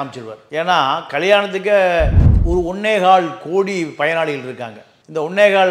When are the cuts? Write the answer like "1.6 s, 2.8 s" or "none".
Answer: 2.2 s